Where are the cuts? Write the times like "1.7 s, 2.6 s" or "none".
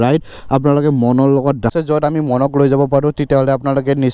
1.7 s